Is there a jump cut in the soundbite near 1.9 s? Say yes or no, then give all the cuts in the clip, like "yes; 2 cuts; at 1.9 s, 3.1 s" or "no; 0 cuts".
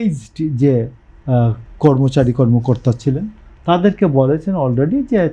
no; 0 cuts